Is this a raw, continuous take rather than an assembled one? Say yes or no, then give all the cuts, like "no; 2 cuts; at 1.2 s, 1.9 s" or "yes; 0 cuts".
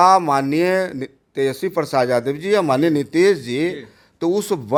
yes; 0 cuts